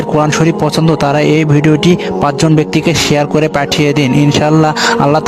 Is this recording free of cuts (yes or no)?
yes